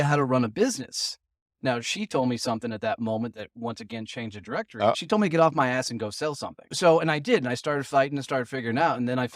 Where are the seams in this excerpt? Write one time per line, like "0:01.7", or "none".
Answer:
0:05.0
0:06.7

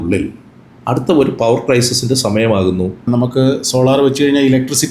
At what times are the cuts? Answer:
0:03.0

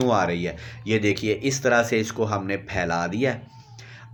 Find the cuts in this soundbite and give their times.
none

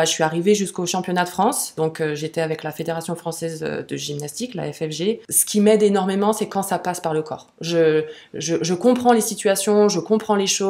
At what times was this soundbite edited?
0:01.7
0:05.3

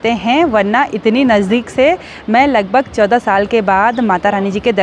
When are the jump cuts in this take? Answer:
none

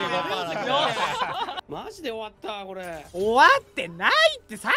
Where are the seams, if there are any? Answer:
0:01.6

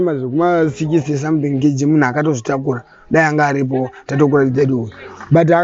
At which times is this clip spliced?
none

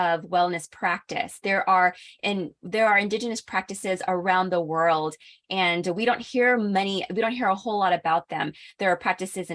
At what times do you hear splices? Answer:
none

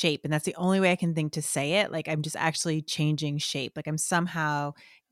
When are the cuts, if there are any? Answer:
none

